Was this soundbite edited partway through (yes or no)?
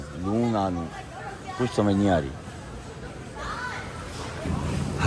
no